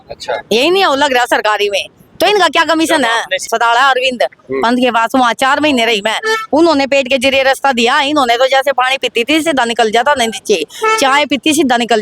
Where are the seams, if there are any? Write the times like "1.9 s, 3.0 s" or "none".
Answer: 3.5 s